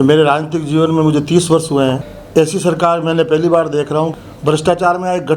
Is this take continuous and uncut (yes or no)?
no